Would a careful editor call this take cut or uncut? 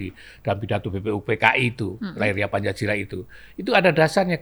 uncut